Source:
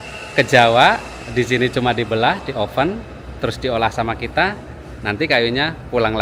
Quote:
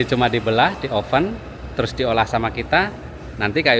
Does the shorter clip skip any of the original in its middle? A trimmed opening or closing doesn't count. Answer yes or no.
no